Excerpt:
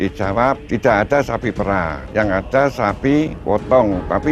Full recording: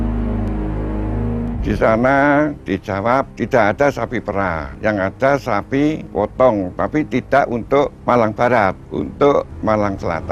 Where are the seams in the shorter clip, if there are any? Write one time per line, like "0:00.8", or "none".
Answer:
none